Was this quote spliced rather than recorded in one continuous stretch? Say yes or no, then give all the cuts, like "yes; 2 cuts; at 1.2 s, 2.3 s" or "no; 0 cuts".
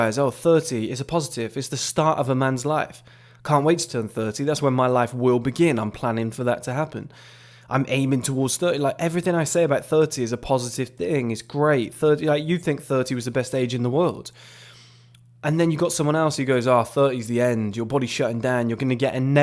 no; 0 cuts